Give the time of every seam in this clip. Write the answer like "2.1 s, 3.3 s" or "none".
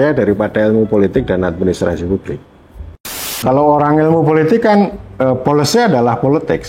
3.3 s